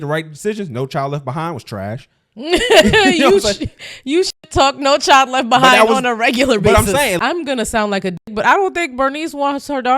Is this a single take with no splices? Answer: no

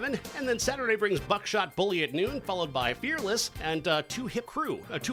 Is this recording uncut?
yes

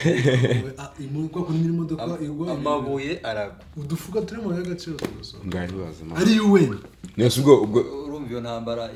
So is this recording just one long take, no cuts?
yes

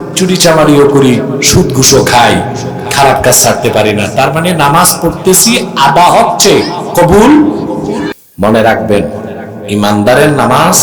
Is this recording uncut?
no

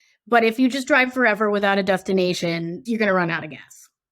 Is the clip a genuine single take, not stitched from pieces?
no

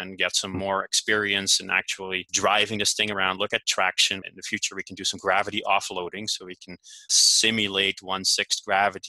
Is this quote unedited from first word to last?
no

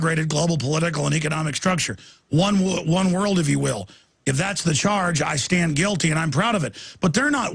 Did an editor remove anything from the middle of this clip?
yes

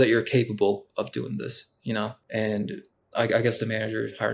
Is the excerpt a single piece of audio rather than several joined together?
no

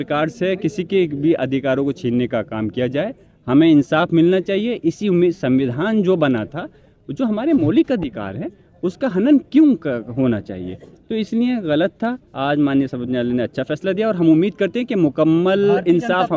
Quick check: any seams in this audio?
no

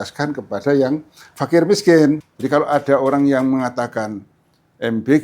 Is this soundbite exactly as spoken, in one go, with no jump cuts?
no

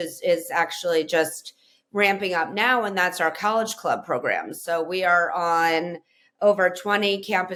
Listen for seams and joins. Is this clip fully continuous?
yes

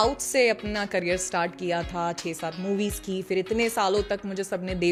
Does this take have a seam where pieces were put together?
no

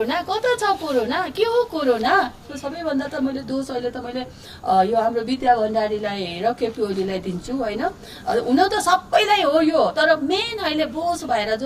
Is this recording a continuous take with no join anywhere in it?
no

